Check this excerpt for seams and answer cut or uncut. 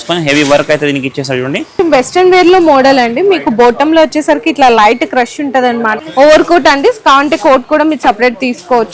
cut